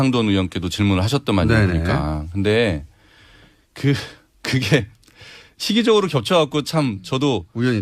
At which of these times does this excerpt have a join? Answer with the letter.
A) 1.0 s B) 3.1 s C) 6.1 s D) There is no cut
C